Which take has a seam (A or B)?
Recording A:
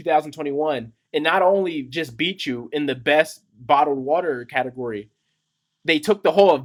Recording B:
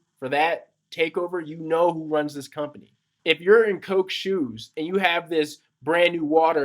B